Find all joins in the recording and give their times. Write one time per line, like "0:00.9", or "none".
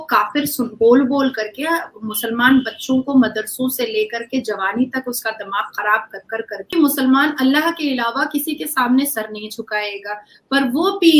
0:06.7

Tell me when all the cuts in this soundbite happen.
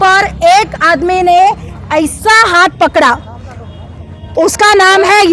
none

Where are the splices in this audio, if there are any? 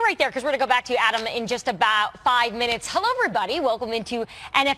0:03.5

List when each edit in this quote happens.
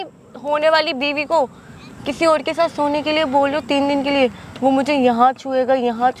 none

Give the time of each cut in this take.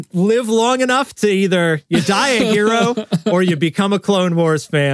none

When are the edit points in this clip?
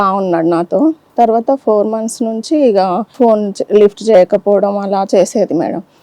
0:01.0
0:03.1

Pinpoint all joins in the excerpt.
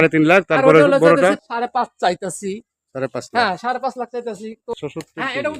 0:01.4
0:04.7

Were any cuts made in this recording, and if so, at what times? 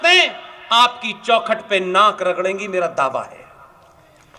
none

